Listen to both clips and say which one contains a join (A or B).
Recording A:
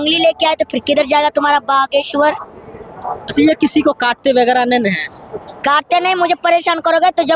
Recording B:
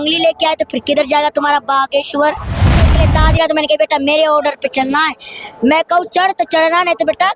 B